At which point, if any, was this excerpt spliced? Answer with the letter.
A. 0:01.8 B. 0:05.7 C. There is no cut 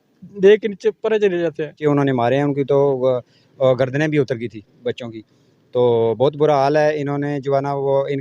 A